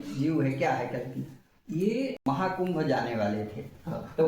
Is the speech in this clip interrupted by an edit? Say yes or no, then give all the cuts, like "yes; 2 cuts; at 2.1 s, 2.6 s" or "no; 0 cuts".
yes; 1 cut; at 2.2 s